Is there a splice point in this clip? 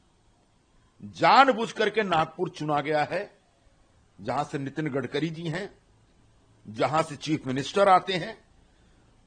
no; 0 cuts

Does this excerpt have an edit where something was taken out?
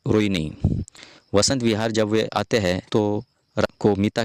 no; 0 cuts

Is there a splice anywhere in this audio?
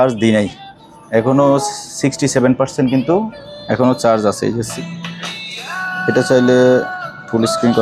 yes; 1 cut; at 4.7 s

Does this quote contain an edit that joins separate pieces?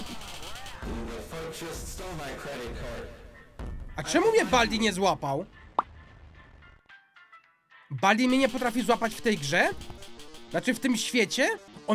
no; 0 cuts

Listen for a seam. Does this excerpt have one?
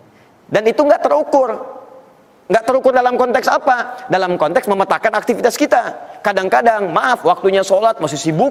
no; 0 cuts

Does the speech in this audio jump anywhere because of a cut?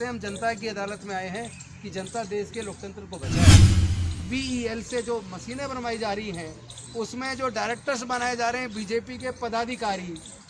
yes; 2 cuts; at 3.2 s, 4.1 s

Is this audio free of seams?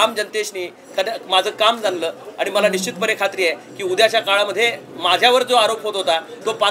yes; 0 cuts

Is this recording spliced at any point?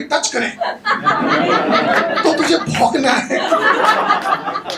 no; 0 cuts

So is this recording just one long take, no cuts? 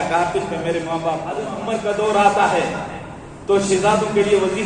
no; 1 cut; at 1.5 s

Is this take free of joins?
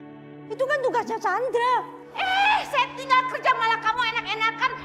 no; 1 cut; at 2.0 s

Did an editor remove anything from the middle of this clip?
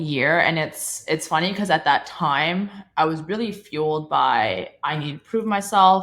no; 0 cuts

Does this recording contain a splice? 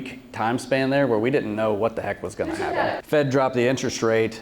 yes; 1 cut; at 3.0 s

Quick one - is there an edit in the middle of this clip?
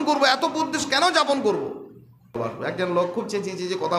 yes; 1 cut; at 2.4 s

